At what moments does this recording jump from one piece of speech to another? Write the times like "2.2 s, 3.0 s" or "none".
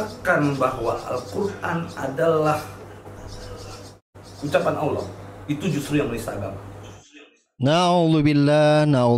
none

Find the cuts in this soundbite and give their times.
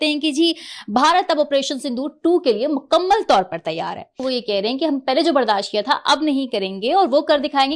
none

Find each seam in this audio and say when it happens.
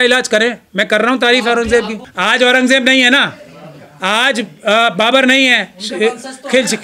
2.1 s

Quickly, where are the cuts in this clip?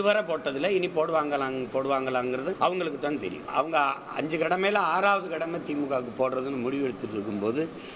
2.6 s, 3.4 s

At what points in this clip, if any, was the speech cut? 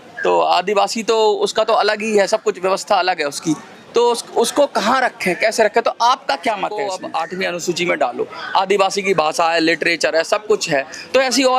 7.0 s

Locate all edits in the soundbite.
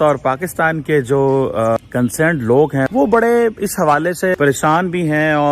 1.8 s, 2.9 s, 4.3 s

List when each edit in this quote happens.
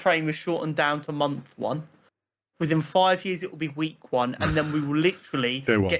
none

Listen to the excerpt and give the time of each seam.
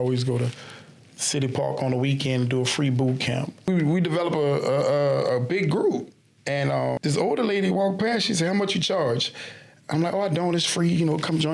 3.7 s, 7.0 s

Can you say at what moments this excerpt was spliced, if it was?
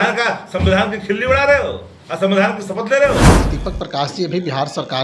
3.5 s

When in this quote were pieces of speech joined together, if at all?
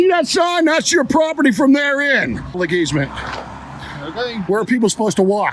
2.5 s

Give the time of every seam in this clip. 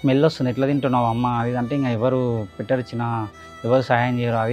none

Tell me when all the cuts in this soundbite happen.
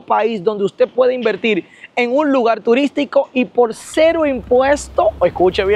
none

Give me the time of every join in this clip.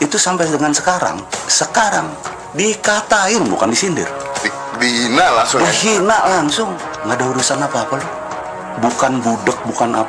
none

